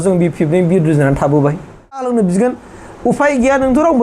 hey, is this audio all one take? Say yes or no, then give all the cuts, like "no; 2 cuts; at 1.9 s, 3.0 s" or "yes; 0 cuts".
no; 1 cut; at 2.1 s